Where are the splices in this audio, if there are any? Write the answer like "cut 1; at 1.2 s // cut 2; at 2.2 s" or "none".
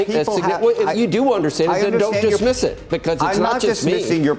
none